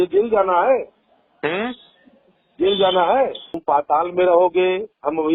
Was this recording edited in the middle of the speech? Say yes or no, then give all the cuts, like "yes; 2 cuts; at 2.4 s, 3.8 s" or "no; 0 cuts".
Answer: yes; 1 cut; at 3.6 s